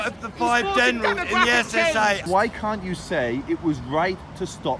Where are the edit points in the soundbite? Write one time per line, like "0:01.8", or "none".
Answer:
0:02.3